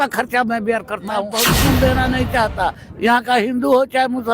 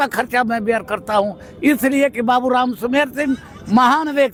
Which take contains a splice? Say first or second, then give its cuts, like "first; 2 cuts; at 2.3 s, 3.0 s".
first; 1 cut; at 1.5 s